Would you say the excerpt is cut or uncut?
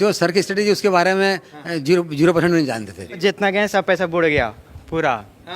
cut